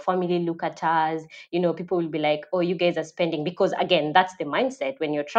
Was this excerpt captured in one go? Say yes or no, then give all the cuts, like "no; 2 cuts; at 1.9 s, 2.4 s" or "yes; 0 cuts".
yes; 0 cuts